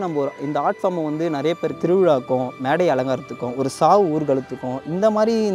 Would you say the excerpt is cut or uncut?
cut